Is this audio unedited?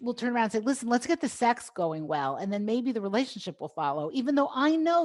yes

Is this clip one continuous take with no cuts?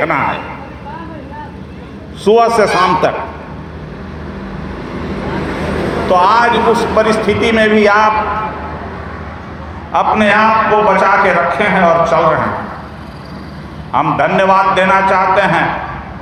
yes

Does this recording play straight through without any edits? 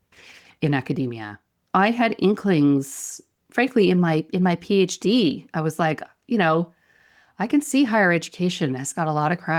yes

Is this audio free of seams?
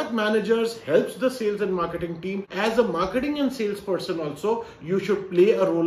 no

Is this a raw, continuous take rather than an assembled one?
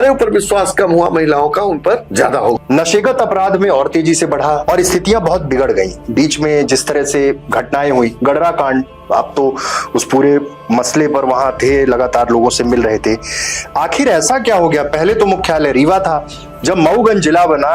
no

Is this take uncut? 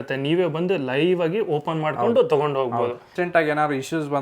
no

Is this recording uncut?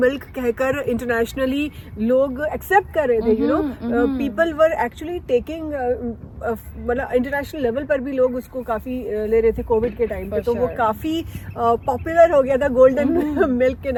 yes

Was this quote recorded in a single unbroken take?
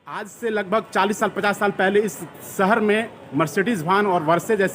yes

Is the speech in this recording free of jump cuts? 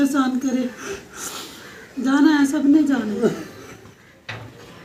yes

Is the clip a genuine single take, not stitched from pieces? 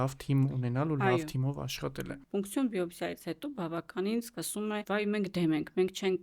no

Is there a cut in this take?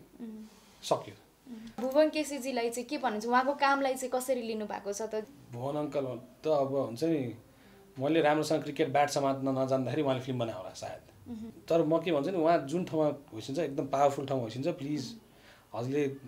yes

